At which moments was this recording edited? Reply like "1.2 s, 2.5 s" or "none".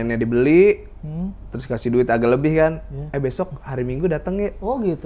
none